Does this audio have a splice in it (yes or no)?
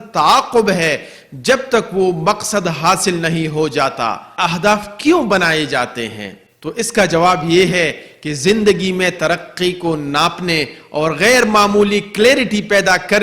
yes